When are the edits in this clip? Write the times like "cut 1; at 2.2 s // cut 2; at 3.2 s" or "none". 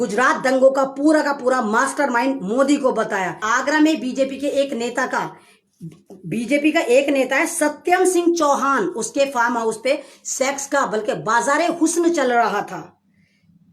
cut 1; at 3.4 s